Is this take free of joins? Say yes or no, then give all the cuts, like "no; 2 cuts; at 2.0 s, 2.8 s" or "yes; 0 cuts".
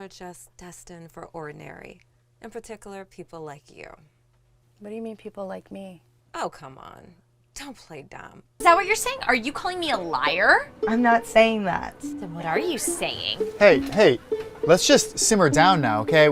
no; 1 cut; at 8.5 s